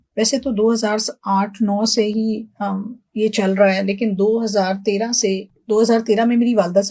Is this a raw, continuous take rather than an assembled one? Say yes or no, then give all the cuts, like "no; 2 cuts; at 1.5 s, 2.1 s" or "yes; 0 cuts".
yes; 0 cuts